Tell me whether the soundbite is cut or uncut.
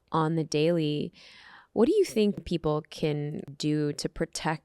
cut